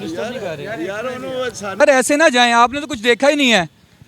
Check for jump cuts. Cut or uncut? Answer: cut